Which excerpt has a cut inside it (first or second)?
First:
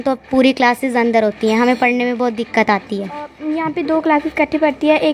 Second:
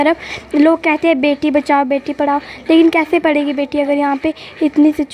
first